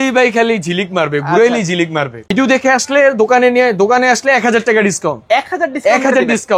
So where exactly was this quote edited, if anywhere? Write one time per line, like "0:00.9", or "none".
0:02.2